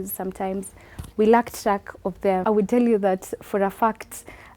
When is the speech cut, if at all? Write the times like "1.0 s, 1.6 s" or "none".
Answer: 2.4 s